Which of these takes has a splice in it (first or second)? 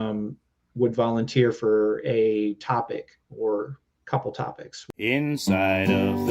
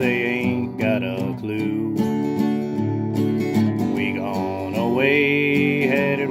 first